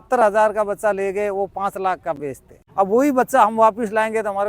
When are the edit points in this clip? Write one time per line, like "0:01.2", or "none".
0:02.5